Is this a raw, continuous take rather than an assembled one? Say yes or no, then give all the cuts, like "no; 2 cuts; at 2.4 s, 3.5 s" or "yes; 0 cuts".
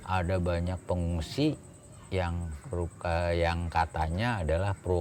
yes; 0 cuts